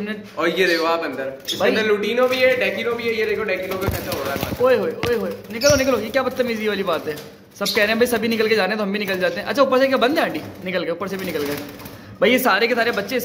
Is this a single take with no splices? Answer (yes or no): yes